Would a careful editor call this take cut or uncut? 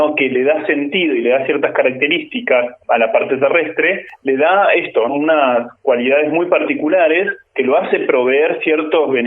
cut